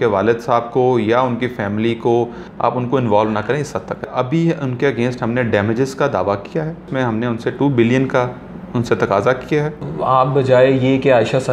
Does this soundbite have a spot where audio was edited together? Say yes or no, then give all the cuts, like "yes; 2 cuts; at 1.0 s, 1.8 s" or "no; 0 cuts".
yes; 4 cuts; at 2.4 s, 4.1 s, 6.9 s, 9.8 s